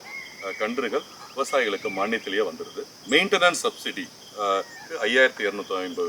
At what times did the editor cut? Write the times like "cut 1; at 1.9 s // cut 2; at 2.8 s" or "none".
cut 1; at 2.9 s // cut 2; at 4.8 s